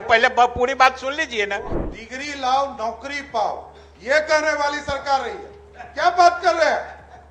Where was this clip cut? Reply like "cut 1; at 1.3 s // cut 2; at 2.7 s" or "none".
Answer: cut 1; at 1.7 s